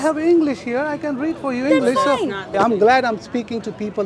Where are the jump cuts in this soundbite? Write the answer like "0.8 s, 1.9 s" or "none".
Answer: 2.5 s

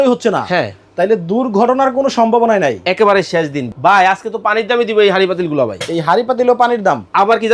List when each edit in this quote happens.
3.7 s

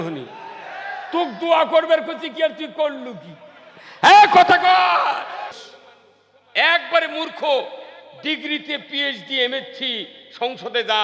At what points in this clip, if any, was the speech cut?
5.6 s

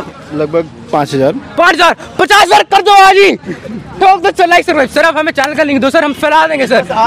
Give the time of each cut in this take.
none

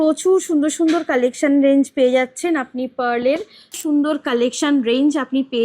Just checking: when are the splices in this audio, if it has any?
3.8 s

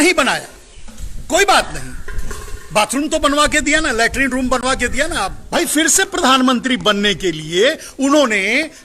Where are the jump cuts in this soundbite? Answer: 5.4 s

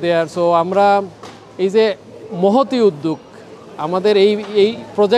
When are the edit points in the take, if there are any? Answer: none

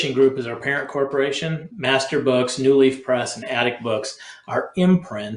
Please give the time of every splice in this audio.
1.7 s

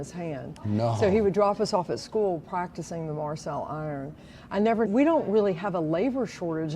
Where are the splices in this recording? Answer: 4.9 s

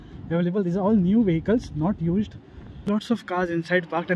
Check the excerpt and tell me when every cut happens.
2.8 s

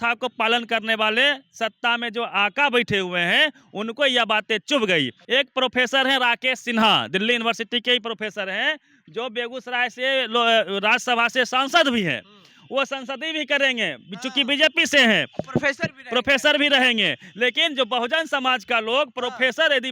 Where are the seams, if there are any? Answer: 5.2 s

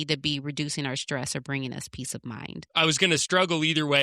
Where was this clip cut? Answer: 2.7 s

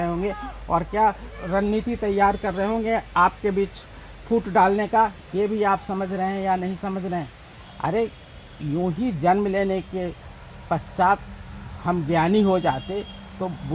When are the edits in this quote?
7.6 s

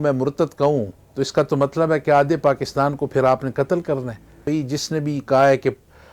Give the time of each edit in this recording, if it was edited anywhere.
4.4 s

